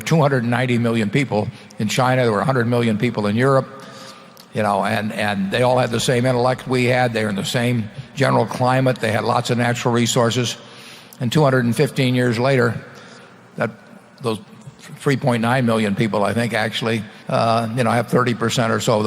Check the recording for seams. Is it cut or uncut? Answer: cut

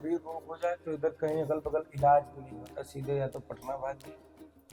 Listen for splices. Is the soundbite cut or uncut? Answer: uncut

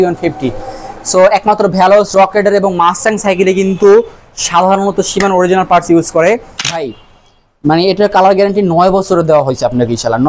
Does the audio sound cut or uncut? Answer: cut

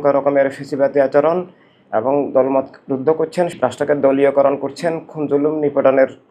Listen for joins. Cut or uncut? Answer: cut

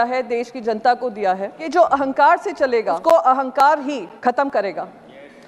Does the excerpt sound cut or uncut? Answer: cut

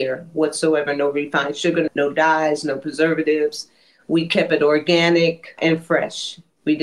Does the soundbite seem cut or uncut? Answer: cut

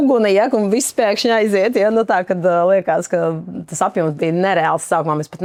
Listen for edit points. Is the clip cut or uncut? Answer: uncut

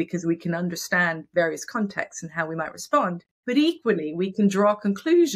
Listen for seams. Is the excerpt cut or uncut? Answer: cut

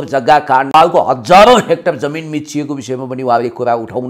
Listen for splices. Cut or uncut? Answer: uncut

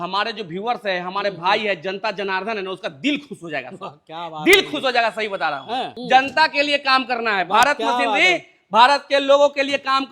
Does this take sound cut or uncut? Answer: cut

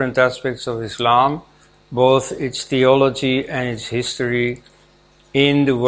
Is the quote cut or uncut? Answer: uncut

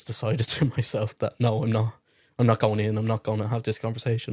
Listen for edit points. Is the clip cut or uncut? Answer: uncut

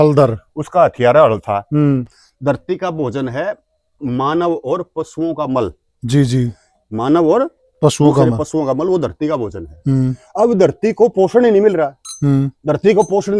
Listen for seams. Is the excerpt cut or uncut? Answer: cut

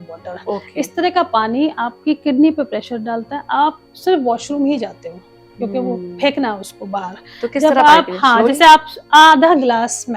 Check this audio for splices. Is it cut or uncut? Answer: uncut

